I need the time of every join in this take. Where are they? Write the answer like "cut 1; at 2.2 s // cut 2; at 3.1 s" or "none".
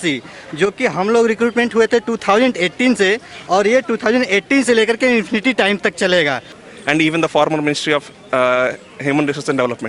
cut 1; at 6.5 s